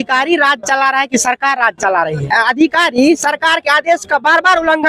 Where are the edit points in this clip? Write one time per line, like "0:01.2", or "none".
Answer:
0:02.3